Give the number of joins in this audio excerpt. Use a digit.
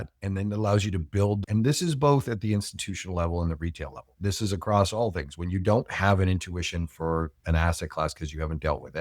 1